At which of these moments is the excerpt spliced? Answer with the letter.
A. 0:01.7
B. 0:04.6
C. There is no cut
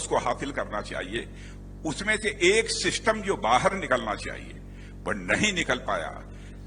C